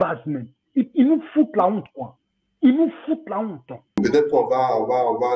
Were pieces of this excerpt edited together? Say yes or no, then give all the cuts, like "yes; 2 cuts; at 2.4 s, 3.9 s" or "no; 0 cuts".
yes; 1 cut; at 3.9 s